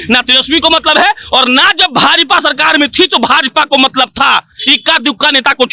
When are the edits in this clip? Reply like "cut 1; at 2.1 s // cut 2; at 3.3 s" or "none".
none